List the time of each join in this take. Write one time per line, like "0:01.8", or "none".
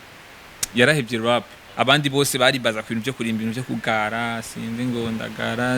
0:01.6